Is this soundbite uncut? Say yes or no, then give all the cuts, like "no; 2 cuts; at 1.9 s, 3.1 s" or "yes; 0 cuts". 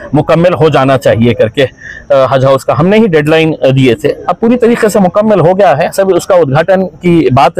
yes; 0 cuts